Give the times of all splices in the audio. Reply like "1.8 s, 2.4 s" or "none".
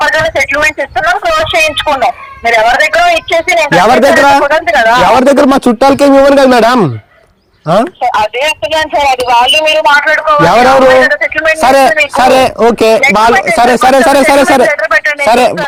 none